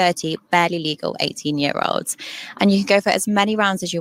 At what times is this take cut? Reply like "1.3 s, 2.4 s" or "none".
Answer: none